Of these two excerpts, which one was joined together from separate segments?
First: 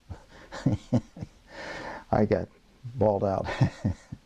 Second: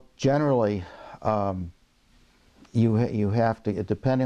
second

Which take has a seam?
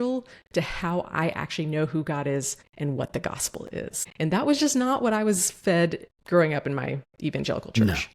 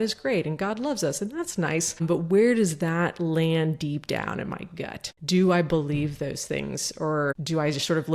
first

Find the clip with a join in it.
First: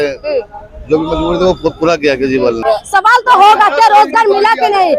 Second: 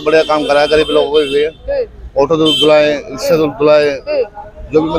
first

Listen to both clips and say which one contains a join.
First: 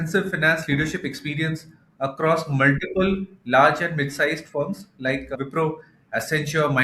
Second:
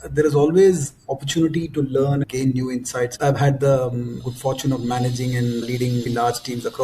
second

